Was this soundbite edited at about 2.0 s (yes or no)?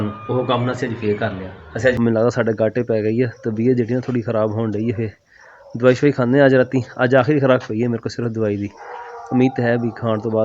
yes